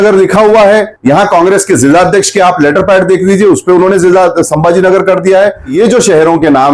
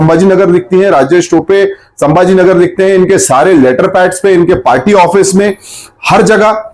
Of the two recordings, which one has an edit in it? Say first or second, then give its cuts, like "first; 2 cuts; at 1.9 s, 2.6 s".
first; 2 cuts; at 0.9 s, 5.7 s